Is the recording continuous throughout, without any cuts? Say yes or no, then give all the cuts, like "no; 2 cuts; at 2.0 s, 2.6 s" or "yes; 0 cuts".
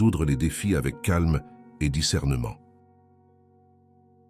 no; 1 cut; at 2.7 s